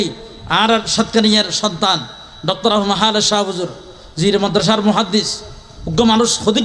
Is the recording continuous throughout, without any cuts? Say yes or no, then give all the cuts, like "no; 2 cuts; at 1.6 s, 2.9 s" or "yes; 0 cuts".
yes; 0 cuts